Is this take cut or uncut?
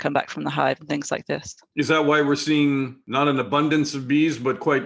cut